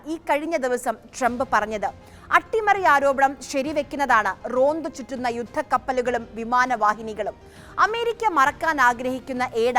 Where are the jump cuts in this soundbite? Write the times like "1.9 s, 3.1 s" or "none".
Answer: none